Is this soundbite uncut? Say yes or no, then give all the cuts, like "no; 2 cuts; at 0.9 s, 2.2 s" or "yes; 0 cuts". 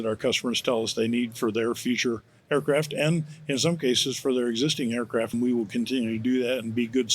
no; 1 cut; at 5.3 s